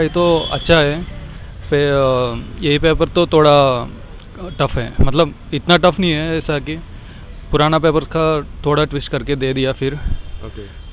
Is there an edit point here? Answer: no; 0 cuts

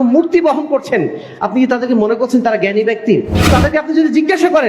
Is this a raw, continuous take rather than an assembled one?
no; 1 cut; at 3.5 s

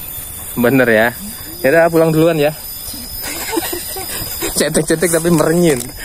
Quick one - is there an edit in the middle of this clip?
no; 0 cuts

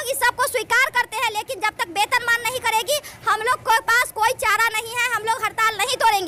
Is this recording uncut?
yes; 0 cuts

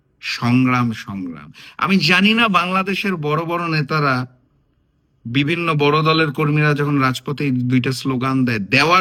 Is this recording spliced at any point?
no; 0 cuts

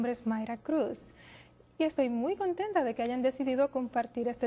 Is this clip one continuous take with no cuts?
no; 1 cut; at 3.0 s

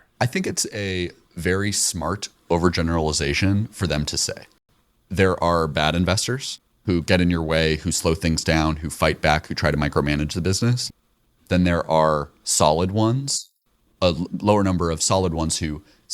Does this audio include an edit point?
yes; 1 cut; at 4.5 s

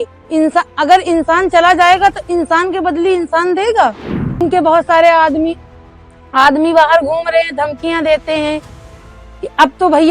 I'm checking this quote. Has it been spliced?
yes; 1 cut; at 4.4 s

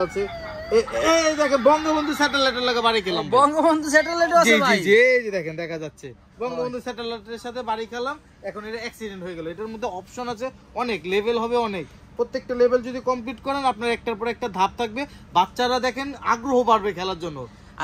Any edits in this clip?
no; 0 cuts

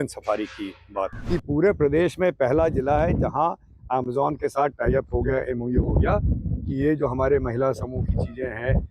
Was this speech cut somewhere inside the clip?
yes; 1 cut; at 1.2 s

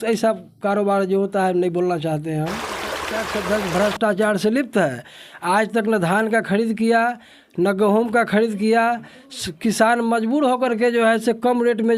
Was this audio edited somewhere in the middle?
yes; 1 cut; at 3.0 s

